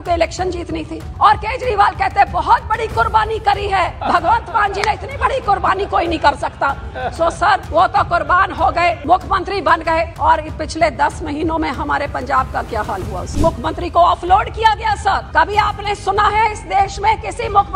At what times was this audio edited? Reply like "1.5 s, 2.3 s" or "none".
1.0 s, 4.0 s, 7.7 s, 9.0 s, 10.1 s, 13.3 s, 15.3 s